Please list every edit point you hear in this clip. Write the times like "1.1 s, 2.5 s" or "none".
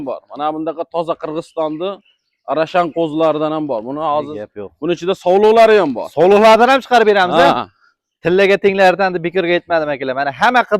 none